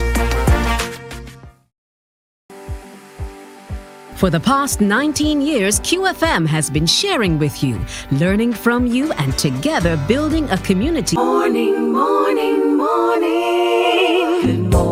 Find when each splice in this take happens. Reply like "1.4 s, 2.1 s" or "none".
none